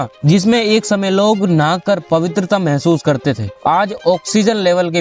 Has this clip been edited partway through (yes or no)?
no